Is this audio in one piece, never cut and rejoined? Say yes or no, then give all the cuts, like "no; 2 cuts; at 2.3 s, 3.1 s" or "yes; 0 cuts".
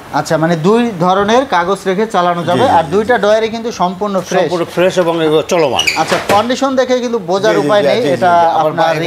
yes; 0 cuts